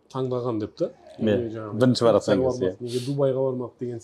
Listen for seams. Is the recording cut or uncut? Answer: uncut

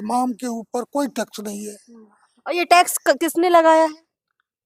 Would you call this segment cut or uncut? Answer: uncut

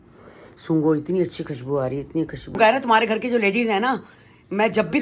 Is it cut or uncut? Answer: cut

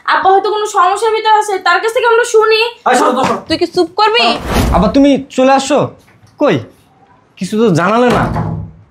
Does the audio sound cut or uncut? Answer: cut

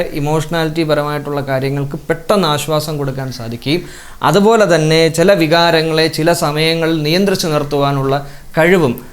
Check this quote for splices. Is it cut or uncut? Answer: uncut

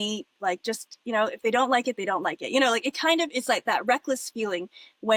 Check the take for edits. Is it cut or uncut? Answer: uncut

